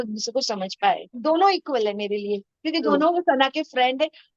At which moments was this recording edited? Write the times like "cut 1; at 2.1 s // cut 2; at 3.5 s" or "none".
cut 1; at 1.1 s